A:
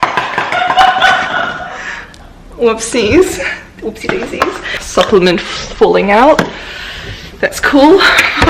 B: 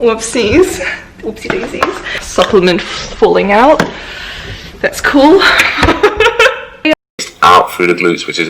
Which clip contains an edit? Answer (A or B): B